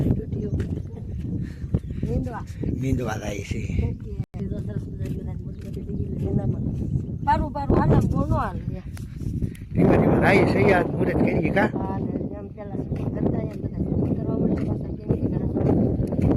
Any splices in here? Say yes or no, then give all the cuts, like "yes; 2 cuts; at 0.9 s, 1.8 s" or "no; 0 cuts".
no; 0 cuts